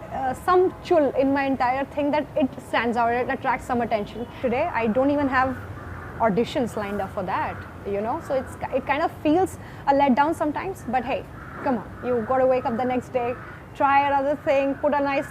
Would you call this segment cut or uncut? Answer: cut